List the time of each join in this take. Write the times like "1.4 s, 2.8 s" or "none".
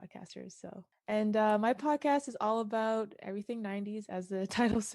0.9 s